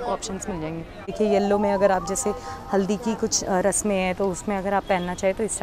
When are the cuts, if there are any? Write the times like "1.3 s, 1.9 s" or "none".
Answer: 1.1 s